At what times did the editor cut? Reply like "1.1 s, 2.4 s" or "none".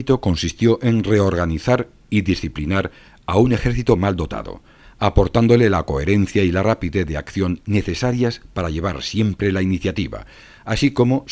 7.3 s